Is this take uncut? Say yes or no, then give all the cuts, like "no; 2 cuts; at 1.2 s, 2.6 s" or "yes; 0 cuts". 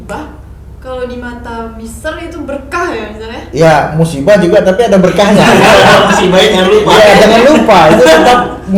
yes; 0 cuts